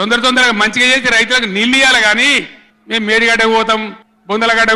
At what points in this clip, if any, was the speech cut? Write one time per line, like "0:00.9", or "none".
none